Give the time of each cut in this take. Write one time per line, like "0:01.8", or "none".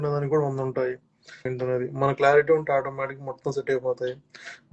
0:01.5